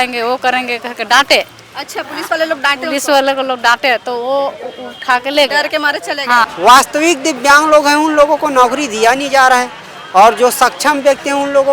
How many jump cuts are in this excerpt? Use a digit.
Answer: 1